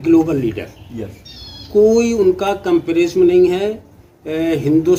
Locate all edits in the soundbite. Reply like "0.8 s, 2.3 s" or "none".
none